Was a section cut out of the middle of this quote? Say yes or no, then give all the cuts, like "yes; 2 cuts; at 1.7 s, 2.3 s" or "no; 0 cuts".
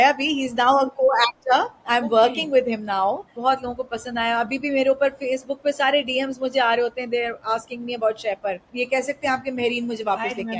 yes; 2 cuts; at 3.3 s, 8.7 s